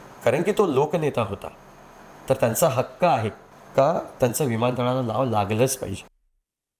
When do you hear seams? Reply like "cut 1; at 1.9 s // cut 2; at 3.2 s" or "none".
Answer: none